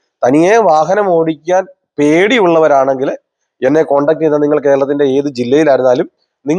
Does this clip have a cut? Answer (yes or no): no